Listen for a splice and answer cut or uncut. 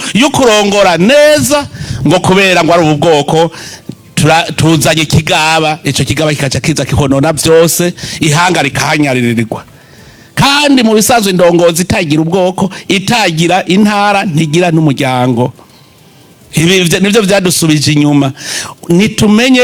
uncut